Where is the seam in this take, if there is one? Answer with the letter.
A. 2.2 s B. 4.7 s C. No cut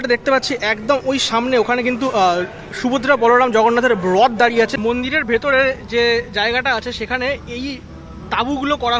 B